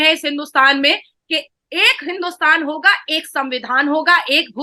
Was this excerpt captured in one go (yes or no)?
yes